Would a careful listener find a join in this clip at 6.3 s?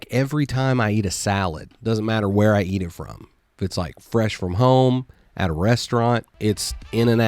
yes; 1 cut; at 6.3 s

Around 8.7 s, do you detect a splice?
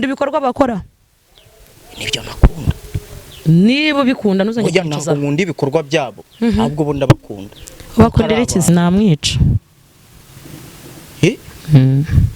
yes; 1 cut; at 8.7 s

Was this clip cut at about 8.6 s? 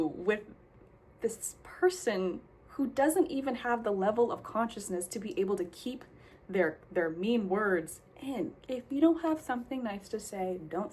yes; 1 cut; at 8.6 s

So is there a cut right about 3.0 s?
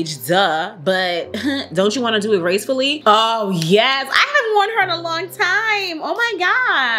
yes; 1 cut; at 3.0 s

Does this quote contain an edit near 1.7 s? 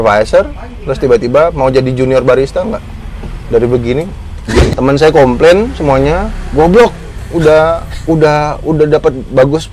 no; 1 cut; at 4.7 s

